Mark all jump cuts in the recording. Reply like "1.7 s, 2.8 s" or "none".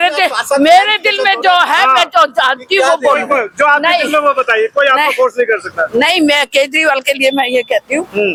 none